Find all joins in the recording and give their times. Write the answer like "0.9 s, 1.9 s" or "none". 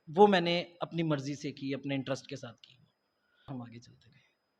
3.6 s